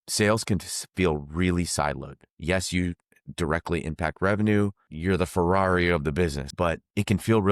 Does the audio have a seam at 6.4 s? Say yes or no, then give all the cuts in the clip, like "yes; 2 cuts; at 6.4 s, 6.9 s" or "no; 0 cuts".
yes; 2 cuts; at 4.9 s, 6.4 s